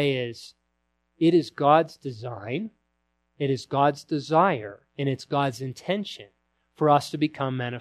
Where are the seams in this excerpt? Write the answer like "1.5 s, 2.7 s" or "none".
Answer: none